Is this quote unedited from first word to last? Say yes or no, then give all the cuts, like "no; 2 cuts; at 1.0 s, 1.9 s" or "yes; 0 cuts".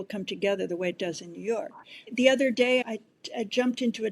no; 2 cuts; at 2.1 s, 2.8 s